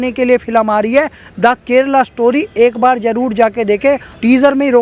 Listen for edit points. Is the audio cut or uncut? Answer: uncut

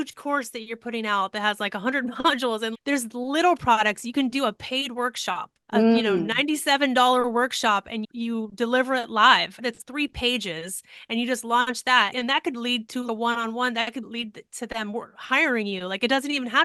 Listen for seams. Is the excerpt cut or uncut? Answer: uncut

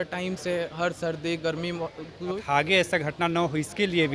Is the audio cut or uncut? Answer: cut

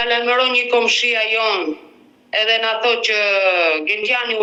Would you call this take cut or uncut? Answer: uncut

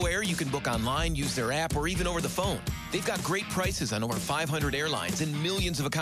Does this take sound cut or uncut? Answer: uncut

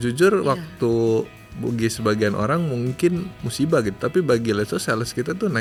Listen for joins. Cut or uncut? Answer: uncut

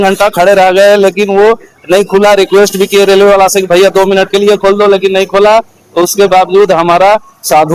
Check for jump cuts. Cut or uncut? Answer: uncut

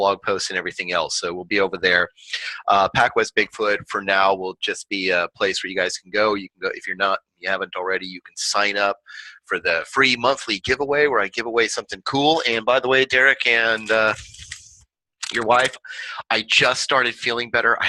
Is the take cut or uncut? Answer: cut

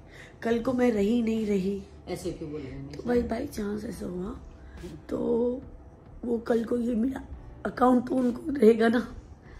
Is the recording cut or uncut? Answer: uncut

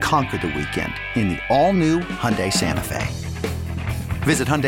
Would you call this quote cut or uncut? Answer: uncut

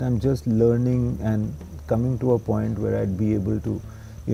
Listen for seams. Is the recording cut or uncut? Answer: uncut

